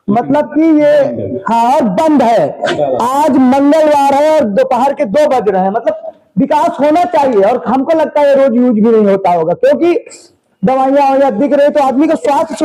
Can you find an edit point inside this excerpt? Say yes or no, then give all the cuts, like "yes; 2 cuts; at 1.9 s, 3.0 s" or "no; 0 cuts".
no; 0 cuts